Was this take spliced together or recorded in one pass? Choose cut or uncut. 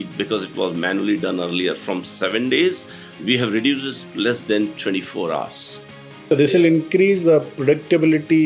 cut